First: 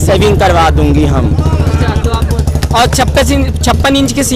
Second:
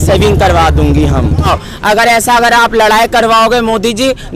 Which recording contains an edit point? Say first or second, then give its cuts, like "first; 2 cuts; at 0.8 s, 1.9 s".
second; 1 cut; at 1.5 s